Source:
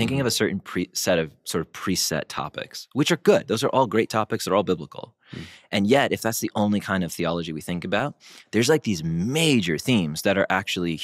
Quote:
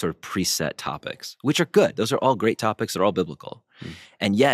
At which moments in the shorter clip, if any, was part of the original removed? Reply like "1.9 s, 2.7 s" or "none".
none